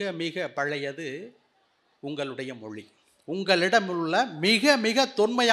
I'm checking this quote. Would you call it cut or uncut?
uncut